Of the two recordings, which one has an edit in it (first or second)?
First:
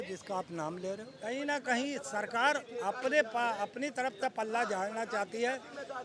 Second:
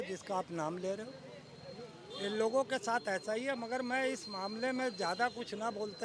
first